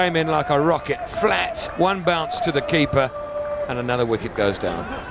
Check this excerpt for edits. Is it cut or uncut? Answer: uncut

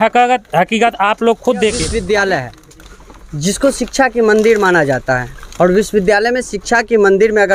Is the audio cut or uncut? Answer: cut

